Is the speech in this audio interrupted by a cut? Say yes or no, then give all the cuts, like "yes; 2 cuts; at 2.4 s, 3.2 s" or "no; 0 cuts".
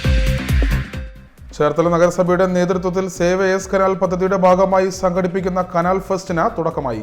yes; 1 cut; at 0.9 s